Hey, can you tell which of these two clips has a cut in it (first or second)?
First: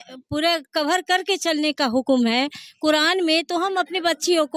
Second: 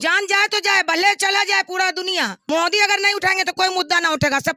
second